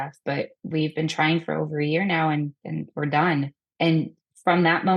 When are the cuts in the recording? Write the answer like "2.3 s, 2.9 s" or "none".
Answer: 3.6 s